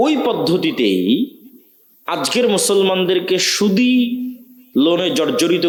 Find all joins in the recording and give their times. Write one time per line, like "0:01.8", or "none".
none